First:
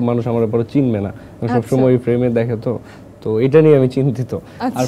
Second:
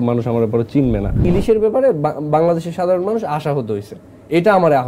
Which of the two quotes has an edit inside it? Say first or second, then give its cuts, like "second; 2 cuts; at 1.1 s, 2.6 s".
second; 1 cut; at 1.2 s